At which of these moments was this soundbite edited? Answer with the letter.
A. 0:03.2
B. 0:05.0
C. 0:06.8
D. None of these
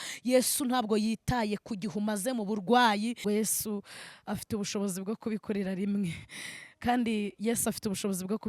A